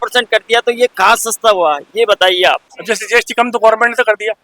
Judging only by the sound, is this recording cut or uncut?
cut